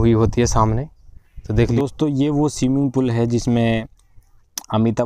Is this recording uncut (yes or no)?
no